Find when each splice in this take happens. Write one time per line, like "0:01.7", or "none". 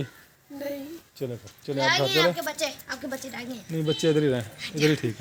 none